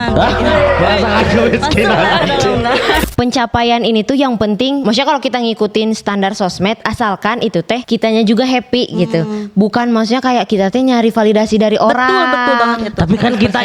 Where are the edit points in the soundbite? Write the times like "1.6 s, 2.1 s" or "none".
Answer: 3.0 s, 4.8 s, 7.8 s